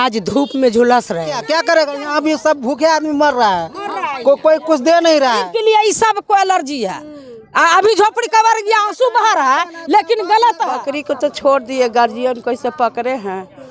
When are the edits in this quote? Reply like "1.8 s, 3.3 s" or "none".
1.4 s, 5.5 s, 10.9 s